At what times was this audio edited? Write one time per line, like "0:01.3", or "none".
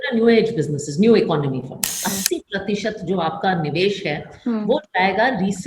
0:02.0